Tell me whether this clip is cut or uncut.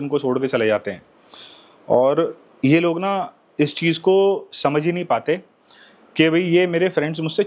uncut